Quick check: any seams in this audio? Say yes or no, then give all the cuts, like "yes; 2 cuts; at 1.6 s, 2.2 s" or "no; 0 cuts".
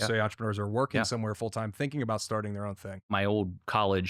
yes; 1 cut; at 3.1 s